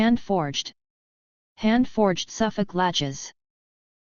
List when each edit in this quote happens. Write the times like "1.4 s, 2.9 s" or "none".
none